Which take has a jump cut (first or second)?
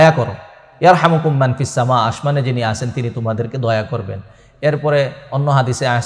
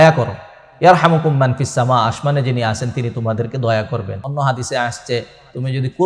second